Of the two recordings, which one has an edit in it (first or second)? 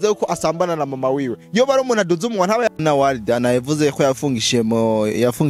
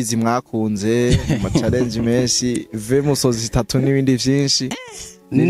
first